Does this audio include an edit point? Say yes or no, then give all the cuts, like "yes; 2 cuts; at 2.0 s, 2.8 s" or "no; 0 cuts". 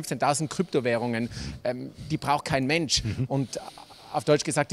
no; 0 cuts